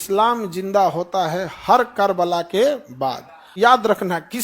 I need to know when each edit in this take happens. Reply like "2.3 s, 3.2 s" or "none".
3.5 s